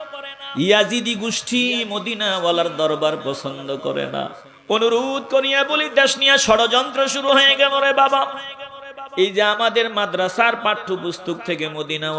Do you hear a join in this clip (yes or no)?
yes